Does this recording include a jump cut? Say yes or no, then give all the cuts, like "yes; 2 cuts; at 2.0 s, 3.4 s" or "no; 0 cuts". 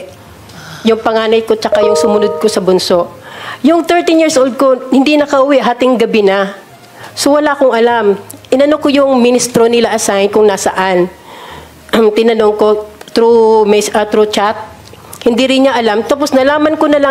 no; 0 cuts